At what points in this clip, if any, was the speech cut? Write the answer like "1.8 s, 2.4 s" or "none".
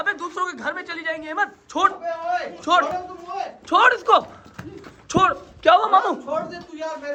none